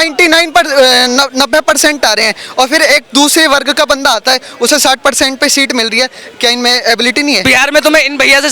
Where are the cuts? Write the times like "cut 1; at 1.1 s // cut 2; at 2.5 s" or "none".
cut 1; at 7.4 s